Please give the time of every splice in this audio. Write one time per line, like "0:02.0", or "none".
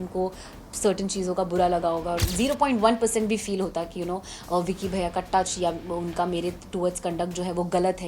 0:02.3